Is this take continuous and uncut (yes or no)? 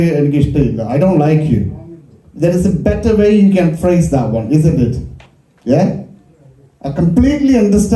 yes